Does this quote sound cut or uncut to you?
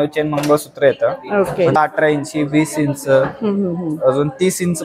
cut